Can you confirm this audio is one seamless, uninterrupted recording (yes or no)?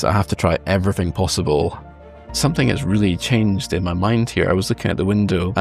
no